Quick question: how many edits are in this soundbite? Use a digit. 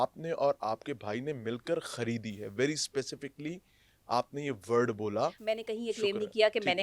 1